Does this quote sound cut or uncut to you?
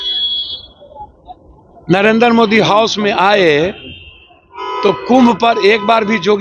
uncut